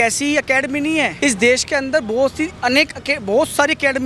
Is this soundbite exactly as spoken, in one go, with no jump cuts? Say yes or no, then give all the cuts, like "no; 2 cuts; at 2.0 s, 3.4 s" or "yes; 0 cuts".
yes; 0 cuts